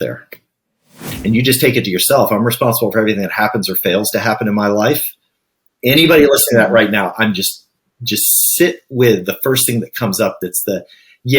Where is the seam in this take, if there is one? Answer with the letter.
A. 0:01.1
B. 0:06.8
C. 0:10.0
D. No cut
A